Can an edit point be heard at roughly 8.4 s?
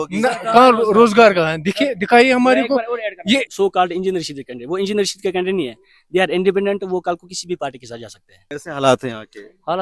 yes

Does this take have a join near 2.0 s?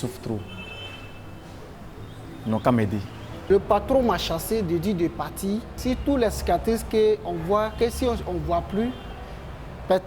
no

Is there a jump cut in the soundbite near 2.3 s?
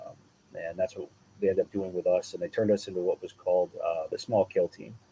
no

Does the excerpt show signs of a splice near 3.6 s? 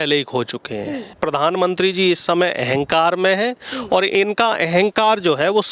no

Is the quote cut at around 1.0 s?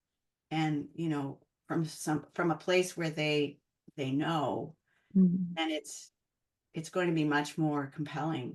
no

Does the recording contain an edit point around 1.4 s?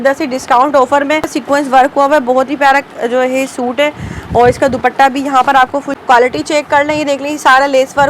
yes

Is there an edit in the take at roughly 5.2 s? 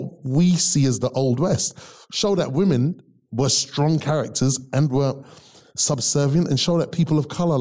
yes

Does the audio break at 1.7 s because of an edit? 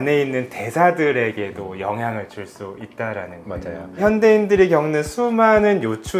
no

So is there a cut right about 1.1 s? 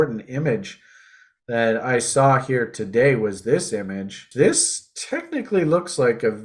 no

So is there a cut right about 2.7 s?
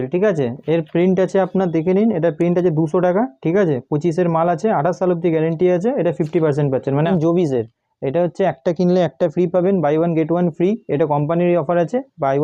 no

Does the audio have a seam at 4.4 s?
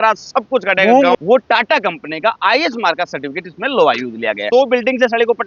yes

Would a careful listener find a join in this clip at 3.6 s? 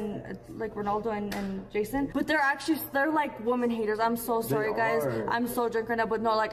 no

